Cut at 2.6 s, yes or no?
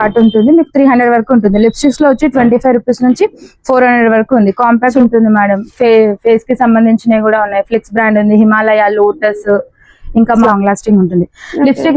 no